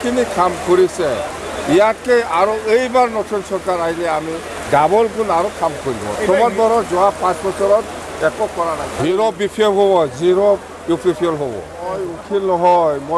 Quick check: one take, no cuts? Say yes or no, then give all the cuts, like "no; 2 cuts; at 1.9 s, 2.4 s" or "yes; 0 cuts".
no; 2 cuts; at 8.9 s, 12.1 s